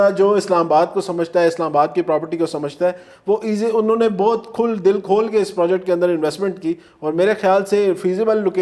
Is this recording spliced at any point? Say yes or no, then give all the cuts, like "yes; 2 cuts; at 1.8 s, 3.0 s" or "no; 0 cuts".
no; 0 cuts